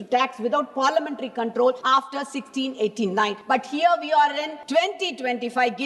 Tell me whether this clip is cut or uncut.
cut